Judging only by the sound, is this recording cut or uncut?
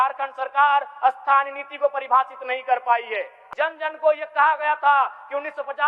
cut